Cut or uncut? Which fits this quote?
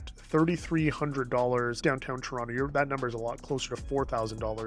cut